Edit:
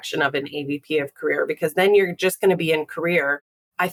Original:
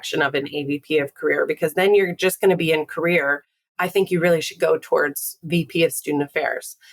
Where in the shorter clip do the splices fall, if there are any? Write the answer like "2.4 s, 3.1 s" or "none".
none